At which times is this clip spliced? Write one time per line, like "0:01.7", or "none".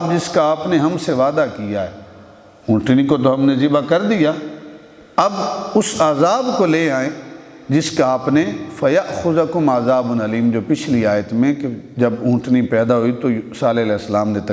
none